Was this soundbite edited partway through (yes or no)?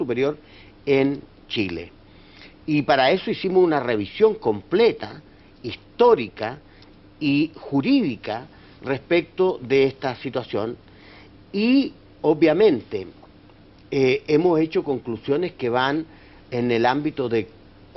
no